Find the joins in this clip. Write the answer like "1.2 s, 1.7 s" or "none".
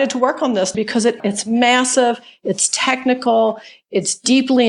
1.0 s